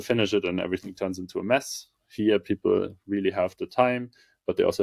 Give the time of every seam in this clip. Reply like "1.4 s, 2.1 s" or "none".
none